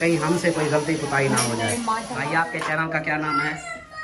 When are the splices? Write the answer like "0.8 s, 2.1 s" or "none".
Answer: 2.2 s